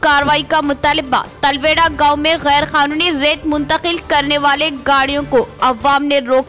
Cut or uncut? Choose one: uncut